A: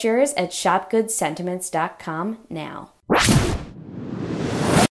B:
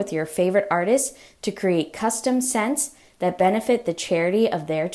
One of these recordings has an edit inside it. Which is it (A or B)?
A